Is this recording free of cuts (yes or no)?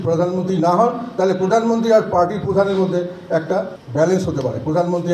no